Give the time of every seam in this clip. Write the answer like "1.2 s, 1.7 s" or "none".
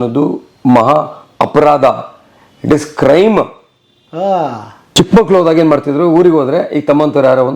4.7 s